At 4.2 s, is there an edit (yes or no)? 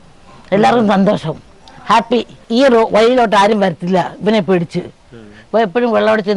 no